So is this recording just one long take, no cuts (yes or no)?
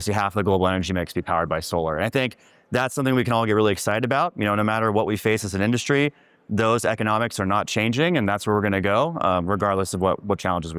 yes